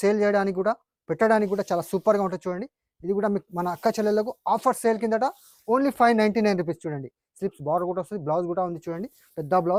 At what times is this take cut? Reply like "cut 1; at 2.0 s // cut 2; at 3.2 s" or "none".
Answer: none